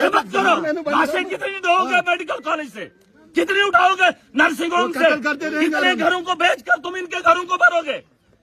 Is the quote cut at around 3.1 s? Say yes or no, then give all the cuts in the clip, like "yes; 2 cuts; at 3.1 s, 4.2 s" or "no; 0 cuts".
no; 0 cuts